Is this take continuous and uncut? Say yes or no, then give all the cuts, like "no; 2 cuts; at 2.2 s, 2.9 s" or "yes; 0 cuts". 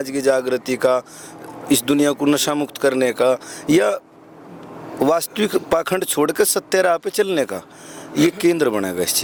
yes; 0 cuts